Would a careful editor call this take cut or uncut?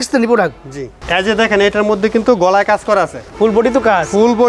cut